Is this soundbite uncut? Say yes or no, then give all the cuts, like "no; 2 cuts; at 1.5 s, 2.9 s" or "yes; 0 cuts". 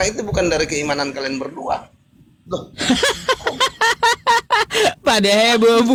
yes; 0 cuts